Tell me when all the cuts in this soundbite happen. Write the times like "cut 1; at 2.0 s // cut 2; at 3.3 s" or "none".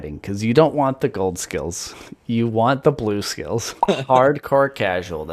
cut 1; at 3.8 s